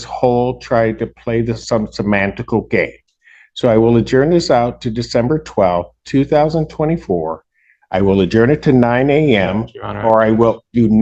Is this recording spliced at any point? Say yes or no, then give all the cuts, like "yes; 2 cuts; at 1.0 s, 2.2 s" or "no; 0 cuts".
no; 0 cuts